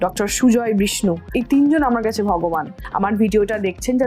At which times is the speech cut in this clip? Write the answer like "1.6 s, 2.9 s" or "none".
1.3 s, 2.8 s